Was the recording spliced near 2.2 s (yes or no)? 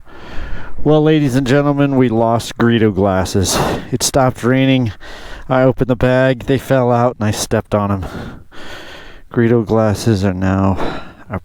no